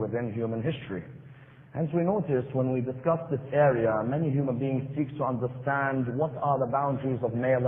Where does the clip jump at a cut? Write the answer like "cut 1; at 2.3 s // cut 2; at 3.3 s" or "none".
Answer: none